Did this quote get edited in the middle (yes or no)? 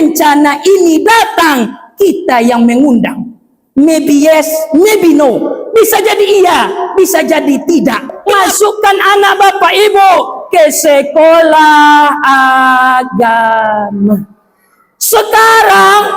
yes